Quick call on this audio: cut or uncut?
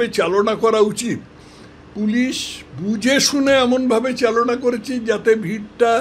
uncut